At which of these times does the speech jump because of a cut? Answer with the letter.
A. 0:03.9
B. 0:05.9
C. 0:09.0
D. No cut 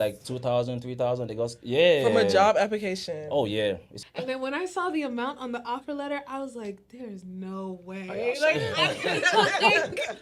A